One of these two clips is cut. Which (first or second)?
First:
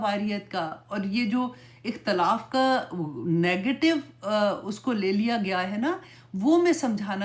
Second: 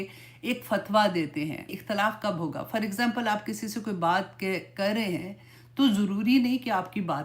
second